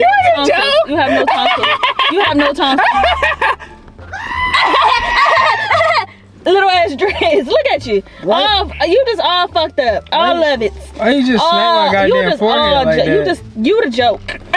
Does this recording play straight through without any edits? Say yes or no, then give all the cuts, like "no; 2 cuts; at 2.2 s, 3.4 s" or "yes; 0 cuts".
yes; 0 cuts